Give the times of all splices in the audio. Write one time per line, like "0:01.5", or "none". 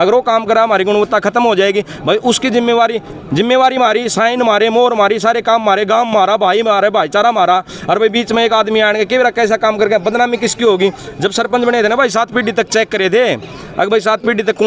none